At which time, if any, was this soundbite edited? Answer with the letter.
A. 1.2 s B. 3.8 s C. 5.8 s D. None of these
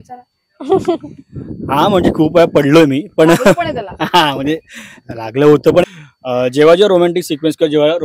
C